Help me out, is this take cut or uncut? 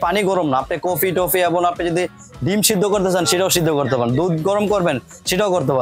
uncut